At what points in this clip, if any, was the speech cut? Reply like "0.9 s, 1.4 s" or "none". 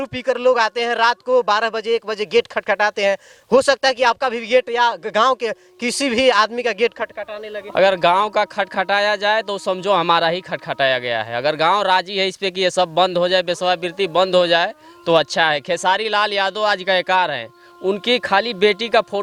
none